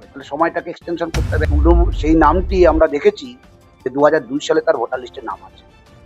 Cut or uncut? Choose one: cut